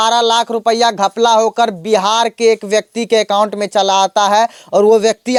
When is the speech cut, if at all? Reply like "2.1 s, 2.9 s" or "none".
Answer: none